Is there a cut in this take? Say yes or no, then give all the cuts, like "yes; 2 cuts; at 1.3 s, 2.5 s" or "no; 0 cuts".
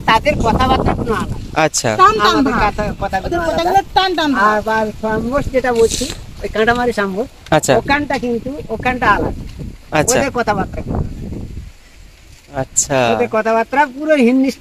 no; 0 cuts